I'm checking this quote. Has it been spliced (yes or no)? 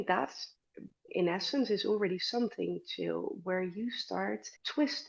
yes